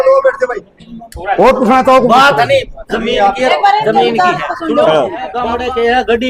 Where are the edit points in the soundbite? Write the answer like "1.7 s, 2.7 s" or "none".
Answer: 5.4 s